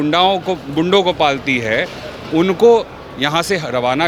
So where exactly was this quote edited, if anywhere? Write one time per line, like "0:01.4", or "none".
none